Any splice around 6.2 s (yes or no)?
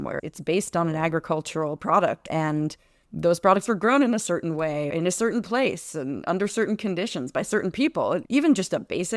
no